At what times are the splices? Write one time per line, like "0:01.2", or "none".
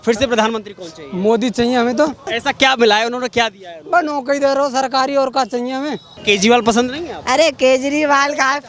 0:02.3
0:06.1